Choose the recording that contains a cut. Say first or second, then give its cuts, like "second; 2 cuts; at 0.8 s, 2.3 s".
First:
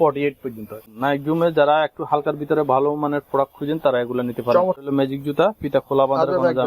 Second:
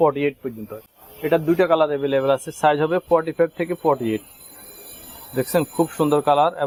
first; 2 cuts; at 0.9 s, 4.8 s